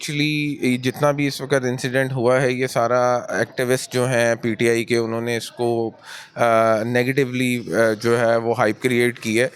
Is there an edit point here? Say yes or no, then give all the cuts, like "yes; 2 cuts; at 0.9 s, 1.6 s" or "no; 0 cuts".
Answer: no; 0 cuts